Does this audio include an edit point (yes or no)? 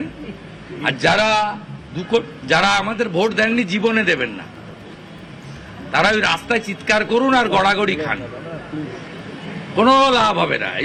no